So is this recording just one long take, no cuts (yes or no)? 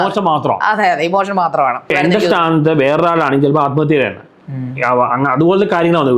no